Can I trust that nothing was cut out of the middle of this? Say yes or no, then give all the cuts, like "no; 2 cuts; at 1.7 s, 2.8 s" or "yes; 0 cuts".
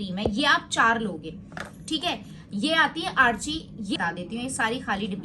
no; 1 cut; at 4.0 s